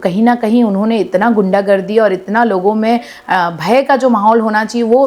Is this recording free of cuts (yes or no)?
yes